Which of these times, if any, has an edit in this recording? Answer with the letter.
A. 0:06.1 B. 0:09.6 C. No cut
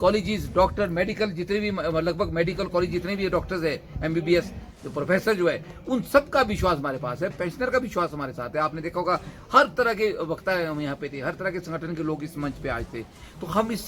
C